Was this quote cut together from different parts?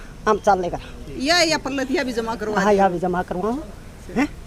no; 0 cuts

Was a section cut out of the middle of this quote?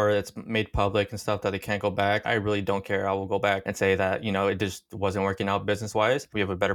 no; 0 cuts

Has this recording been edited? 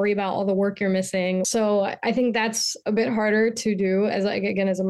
yes; 1 cut; at 1.5 s

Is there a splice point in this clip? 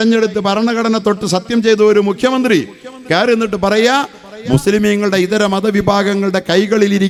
no; 0 cuts

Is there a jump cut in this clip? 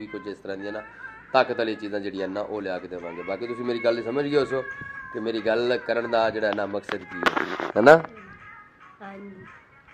no; 0 cuts

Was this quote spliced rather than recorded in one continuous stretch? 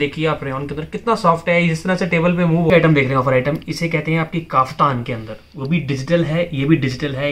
yes; 1 cut; at 2.7 s

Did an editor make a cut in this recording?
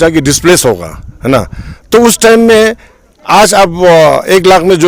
no; 0 cuts

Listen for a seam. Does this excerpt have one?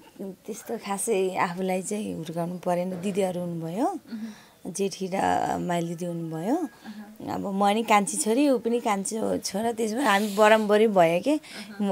no; 0 cuts

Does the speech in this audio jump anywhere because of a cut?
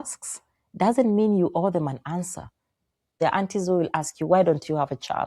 yes; 1 cut; at 3.0 s

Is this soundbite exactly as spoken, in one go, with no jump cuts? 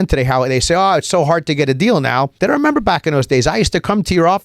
no; 1 cut; at 2.3 s

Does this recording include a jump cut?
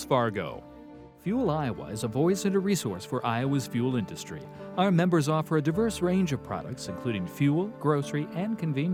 no; 0 cuts

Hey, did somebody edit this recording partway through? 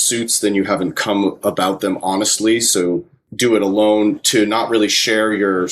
yes; 1 cut; at 3.2 s

